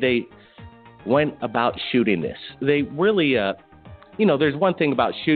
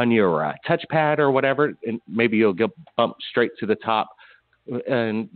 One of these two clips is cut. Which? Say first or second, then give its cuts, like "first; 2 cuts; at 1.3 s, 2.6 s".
first; 1 cut; at 2.2 s